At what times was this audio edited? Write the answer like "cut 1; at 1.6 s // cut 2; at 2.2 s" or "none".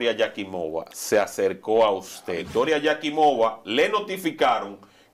cut 1; at 2.3 s

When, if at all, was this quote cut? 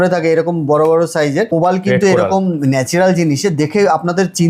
cut 1; at 1.5 s

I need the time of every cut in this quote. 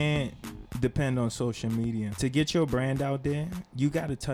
cut 1; at 2.1 s

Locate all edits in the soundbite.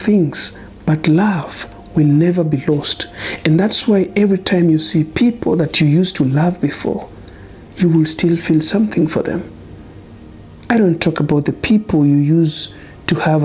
none

